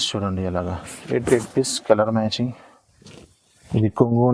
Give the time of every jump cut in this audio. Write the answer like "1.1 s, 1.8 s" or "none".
3.1 s